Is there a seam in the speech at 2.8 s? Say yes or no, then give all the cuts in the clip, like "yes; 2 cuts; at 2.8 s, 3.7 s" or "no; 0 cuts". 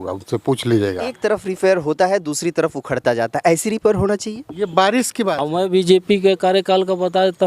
no; 2 cuts; at 1.2 s, 5.4 s